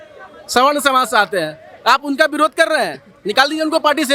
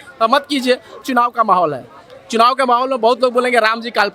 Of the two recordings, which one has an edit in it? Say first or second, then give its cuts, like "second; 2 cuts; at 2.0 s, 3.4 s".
second; 1 cut; at 1.0 s